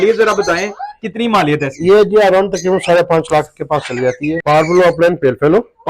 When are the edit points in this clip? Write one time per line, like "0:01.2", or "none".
0:04.4